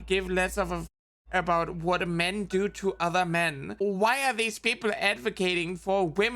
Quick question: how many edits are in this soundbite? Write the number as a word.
one